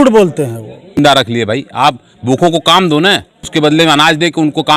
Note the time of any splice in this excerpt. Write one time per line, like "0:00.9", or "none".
0:01.0
0:03.4